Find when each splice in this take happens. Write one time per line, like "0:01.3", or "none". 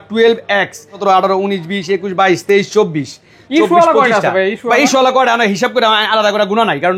0:01.0